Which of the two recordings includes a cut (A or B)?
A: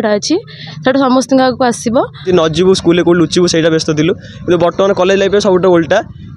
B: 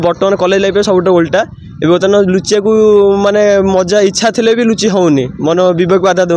A